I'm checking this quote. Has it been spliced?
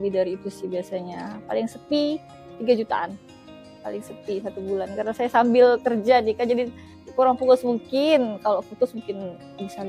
no; 0 cuts

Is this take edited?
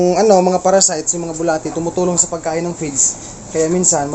no; 0 cuts

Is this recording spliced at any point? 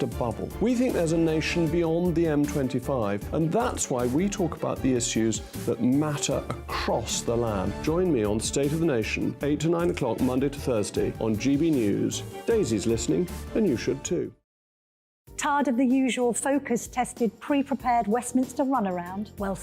yes; 1 cut; at 14.9 s

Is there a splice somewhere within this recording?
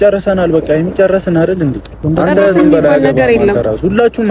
yes; 1 cut; at 1.9 s

